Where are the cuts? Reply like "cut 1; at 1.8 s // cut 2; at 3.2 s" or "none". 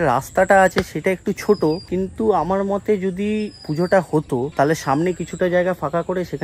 none